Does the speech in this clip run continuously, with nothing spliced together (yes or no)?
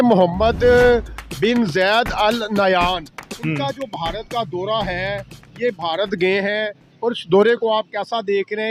yes